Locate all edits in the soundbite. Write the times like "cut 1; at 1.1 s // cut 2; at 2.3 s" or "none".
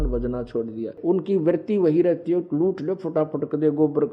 cut 1; at 1.0 s